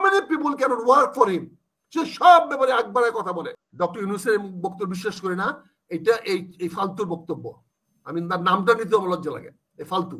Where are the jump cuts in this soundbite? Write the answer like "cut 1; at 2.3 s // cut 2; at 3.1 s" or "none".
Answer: cut 1; at 3.6 s

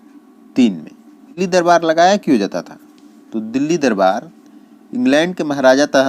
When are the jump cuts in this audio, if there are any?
cut 1; at 1.4 s

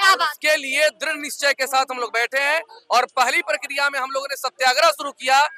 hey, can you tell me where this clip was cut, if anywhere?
none

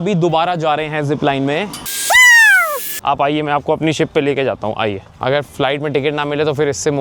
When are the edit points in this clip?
cut 1; at 1.9 s // cut 2; at 2.9 s // cut 3; at 5.1 s

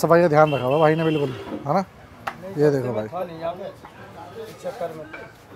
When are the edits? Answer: none

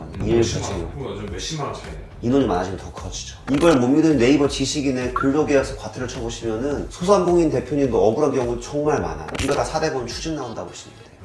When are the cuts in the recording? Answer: cut 1; at 3.3 s // cut 2; at 9.2 s

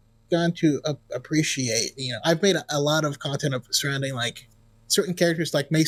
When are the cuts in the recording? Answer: none

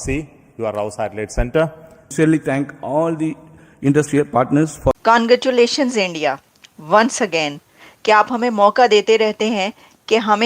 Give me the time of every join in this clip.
cut 1; at 2.1 s // cut 2; at 4.9 s

